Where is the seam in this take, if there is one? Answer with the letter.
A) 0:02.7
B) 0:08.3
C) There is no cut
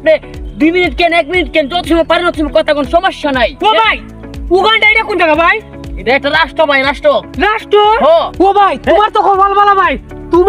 B